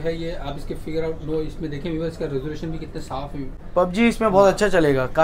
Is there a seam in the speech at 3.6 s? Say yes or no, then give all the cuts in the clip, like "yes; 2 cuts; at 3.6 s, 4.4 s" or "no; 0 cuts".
no; 0 cuts